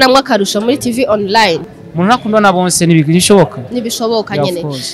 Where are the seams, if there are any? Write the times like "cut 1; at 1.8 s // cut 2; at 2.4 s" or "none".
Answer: cut 1; at 1.7 s